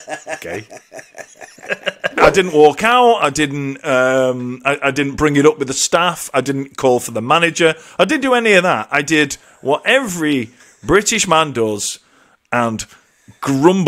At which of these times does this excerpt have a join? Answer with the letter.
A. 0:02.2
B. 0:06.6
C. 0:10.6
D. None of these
A